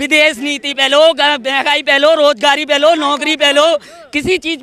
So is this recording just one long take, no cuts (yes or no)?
yes